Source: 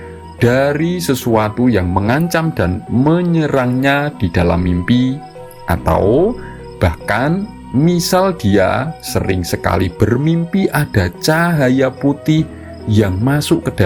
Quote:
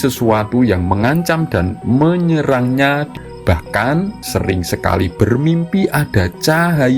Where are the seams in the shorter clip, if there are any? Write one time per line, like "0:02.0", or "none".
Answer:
0:03.1
0:04.2